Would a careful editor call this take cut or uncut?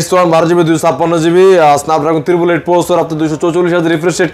uncut